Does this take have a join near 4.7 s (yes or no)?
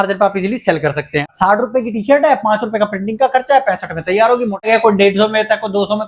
yes